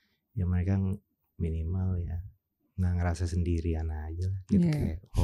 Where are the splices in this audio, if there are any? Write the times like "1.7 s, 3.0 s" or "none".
none